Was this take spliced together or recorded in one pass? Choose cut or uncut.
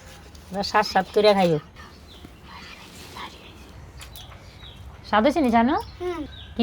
cut